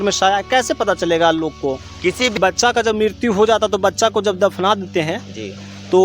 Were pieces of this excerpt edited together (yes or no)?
yes